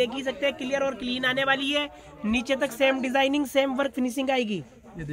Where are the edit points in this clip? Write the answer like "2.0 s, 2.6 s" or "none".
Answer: none